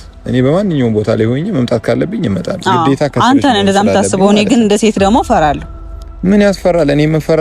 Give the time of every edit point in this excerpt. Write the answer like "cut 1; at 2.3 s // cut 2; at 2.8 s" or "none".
none